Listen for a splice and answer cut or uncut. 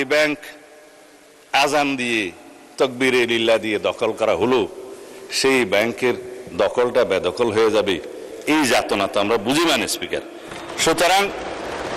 uncut